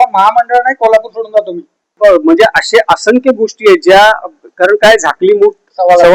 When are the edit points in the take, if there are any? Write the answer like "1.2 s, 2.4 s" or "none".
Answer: 1.9 s